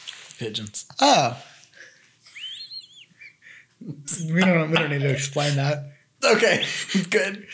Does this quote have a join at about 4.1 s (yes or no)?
no